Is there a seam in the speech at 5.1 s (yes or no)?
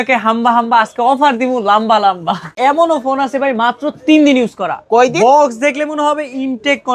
no